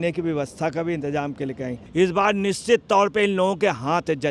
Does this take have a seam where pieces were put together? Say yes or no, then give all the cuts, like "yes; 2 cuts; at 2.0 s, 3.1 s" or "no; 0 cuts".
yes; 1 cut; at 1.8 s